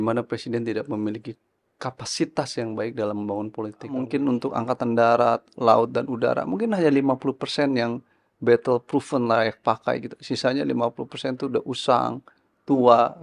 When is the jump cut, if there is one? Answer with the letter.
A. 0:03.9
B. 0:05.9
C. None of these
A